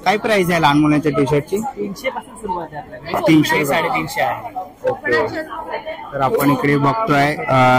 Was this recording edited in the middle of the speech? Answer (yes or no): no